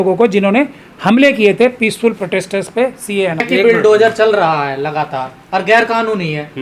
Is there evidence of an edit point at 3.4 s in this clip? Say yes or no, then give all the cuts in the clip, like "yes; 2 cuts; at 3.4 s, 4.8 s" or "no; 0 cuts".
yes; 1 cut; at 3.4 s